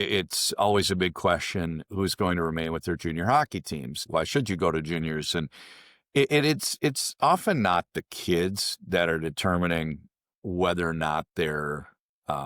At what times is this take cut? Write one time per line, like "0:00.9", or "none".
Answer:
0:04.0